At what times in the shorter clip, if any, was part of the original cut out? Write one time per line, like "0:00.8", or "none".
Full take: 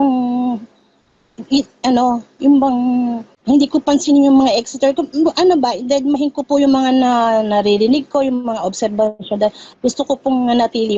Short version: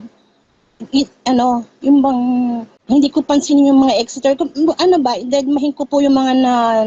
none